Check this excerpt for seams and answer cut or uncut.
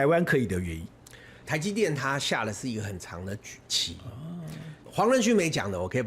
cut